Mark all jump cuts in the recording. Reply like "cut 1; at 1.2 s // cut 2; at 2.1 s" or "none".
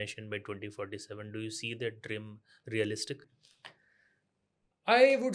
none

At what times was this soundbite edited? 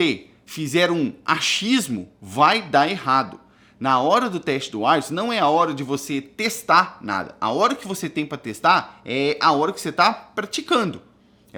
none

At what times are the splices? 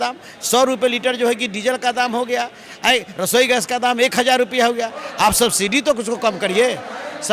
none

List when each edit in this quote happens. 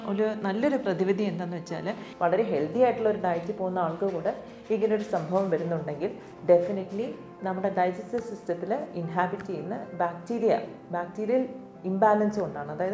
cut 1; at 2.0 s

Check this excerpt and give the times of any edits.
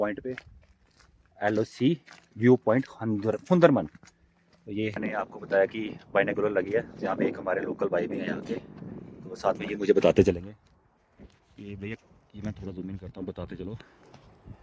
cut 1; at 5.0 s

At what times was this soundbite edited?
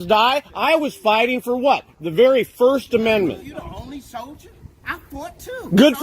none

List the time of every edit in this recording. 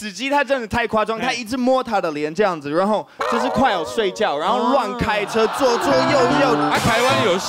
none

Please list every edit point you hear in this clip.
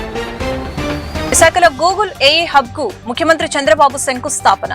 cut 1; at 1.3 s

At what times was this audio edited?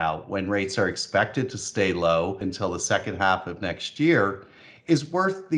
cut 1; at 2.5 s

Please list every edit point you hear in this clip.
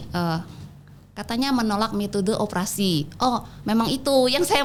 none

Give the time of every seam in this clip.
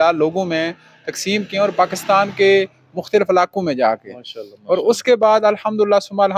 none

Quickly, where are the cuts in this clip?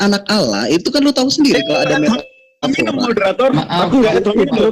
none

